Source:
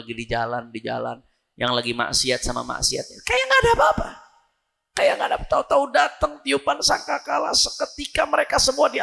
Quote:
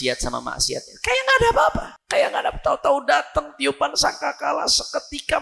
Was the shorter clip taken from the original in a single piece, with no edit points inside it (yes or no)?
no